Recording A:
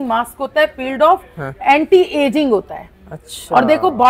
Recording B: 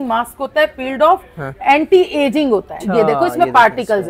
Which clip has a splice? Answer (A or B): B